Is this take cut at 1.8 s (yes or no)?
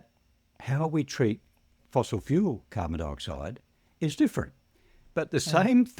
yes